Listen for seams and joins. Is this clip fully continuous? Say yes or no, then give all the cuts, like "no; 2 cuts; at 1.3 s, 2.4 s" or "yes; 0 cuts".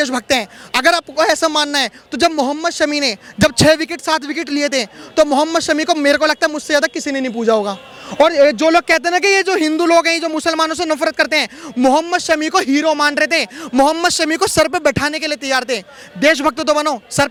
yes; 0 cuts